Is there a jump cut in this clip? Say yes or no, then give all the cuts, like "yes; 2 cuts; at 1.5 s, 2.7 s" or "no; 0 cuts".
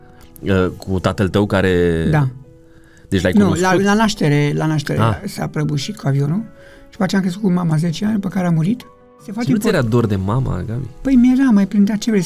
yes; 1 cut; at 9.3 s